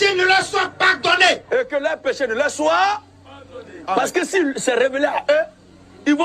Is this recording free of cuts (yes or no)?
yes